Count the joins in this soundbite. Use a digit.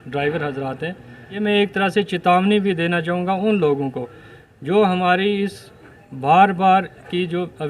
1